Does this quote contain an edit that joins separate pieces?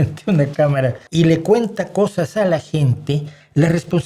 yes; 1 cut; at 1.0 s

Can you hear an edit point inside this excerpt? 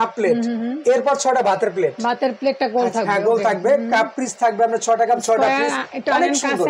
no; 0 cuts

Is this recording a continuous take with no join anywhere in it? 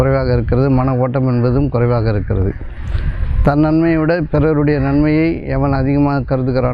yes; 0 cuts

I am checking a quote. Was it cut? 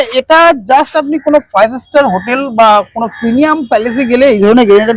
no; 0 cuts

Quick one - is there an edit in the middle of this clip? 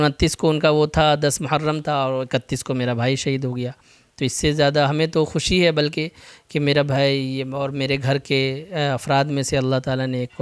no; 0 cuts

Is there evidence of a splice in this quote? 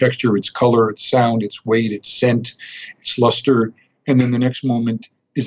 no; 0 cuts

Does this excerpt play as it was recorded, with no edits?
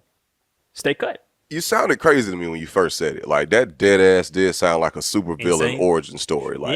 no; 1 cut; at 1.3 s

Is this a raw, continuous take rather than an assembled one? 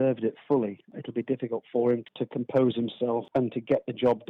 no; 3 cuts; at 0.9 s, 2.1 s, 3.2 s

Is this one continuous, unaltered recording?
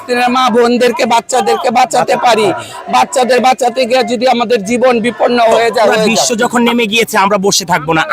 no; 1 cut; at 6.2 s

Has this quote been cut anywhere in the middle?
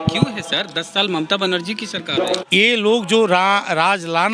yes; 1 cut; at 2.4 s

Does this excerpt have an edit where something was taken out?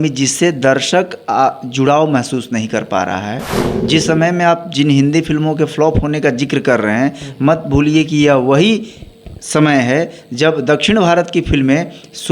no; 0 cuts

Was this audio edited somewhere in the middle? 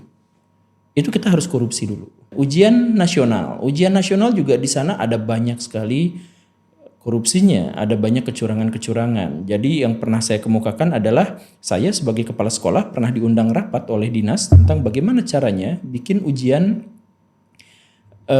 yes; 1 cut; at 2.3 s

